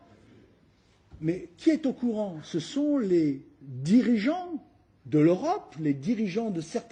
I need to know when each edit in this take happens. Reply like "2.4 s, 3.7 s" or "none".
none